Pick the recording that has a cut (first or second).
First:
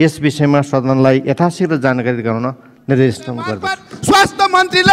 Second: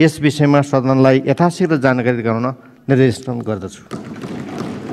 first